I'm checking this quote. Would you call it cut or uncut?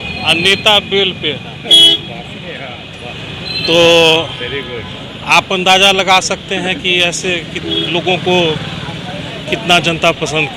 uncut